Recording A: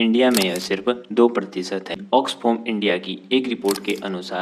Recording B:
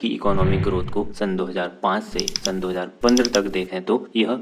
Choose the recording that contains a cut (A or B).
A